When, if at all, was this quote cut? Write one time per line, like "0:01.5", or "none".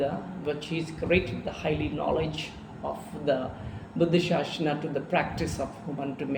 none